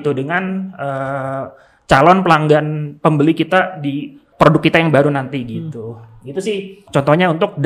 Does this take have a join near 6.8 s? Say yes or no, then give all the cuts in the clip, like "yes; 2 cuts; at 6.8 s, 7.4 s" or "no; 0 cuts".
yes; 2 cuts; at 4.2 s, 6.8 s